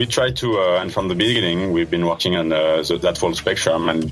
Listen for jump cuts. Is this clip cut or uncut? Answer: uncut